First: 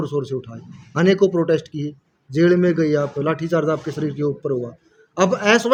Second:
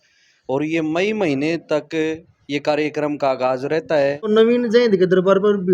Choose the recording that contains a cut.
second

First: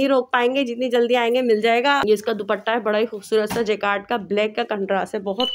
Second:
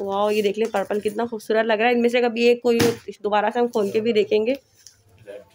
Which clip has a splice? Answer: first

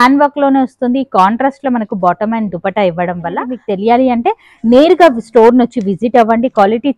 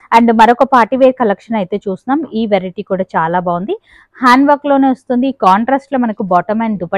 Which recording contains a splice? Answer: first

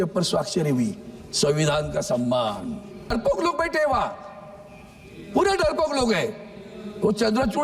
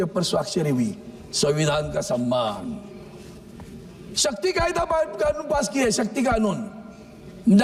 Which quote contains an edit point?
first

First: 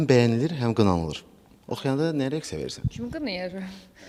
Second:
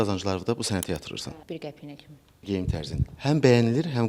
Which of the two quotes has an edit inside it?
second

